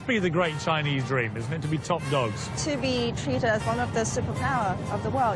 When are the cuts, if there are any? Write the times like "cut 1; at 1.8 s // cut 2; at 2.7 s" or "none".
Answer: cut 1; at 2.5 s